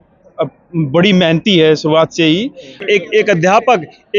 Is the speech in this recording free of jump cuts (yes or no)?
no